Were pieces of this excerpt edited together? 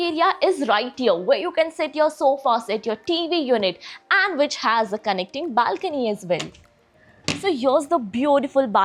no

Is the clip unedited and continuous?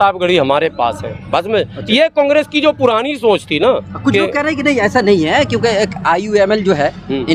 yes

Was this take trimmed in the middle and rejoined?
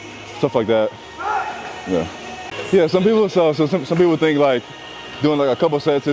no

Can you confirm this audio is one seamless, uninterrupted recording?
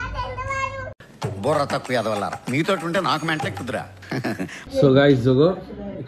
no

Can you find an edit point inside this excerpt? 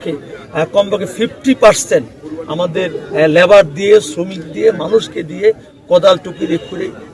no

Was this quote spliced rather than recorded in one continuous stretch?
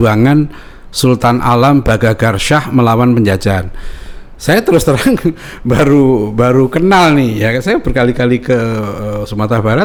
no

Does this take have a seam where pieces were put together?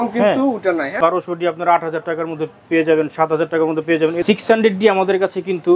yes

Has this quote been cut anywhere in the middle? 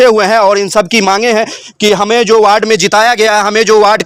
no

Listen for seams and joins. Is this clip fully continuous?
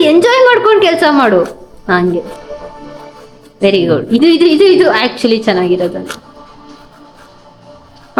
yes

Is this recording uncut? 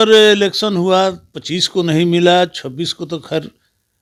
yes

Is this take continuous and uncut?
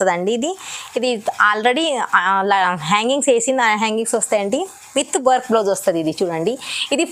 yes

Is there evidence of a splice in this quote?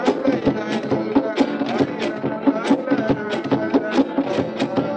yes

